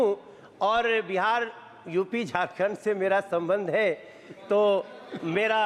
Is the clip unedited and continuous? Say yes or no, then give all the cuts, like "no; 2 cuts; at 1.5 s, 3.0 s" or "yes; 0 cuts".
yes; 0 cuts